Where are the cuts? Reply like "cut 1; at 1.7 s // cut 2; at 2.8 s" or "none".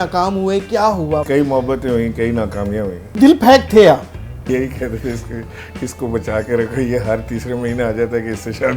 cut 1; at 1.2 s // cut 2; at 3.2 s // cut 3; at 4.5 s

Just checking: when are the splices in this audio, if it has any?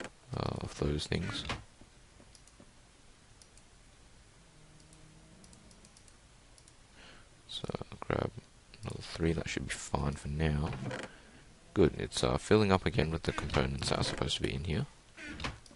cut 1; at 14.8 s

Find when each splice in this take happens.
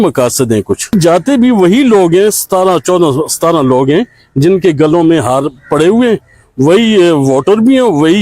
cut 1; at 0.9 s

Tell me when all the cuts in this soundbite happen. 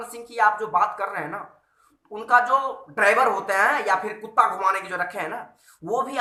none

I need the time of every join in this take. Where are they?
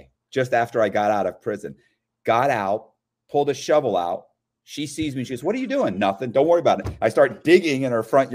none

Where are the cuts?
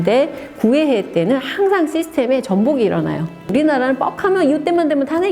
cut 1; at 3.5 s

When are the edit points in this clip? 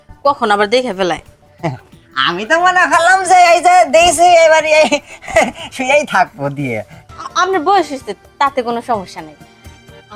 cut 1; at 7.1 s

